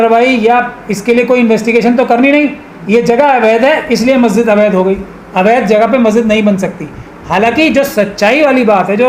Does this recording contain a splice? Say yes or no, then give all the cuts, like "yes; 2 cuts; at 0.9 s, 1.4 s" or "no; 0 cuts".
no; 0 cuts